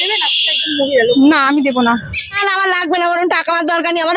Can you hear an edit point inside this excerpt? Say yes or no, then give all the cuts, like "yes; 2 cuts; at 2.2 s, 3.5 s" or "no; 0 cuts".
yes; 1 cut; at 2.4 s